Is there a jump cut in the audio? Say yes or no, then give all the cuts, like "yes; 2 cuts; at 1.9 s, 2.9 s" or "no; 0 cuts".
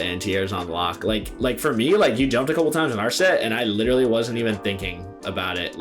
yes; 1 cut; at 1.3 s